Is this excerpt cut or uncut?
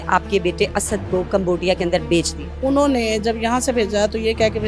cut